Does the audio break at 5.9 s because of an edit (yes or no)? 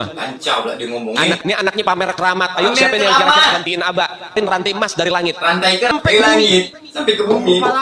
yes